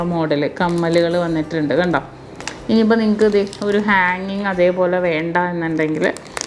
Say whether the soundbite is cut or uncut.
uncut